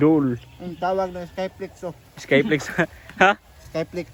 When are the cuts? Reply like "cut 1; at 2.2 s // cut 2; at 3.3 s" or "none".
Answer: none